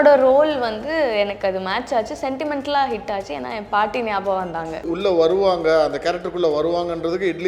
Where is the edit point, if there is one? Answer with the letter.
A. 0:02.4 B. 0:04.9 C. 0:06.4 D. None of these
B